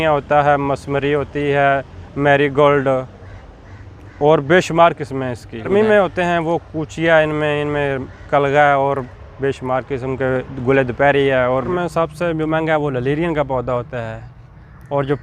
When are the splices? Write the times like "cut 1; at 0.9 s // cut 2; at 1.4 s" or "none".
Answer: cut 1; at 5.7 s // cut 2; at 11.7 s